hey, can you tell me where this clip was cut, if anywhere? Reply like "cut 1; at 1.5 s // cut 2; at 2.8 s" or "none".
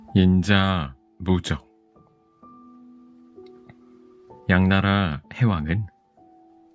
none